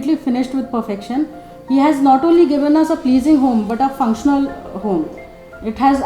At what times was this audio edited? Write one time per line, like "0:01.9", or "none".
none